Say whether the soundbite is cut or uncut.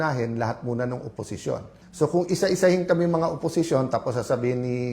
cut